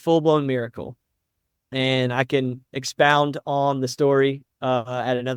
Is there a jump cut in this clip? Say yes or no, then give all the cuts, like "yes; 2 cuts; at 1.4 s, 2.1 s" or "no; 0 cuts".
no; 0 cuts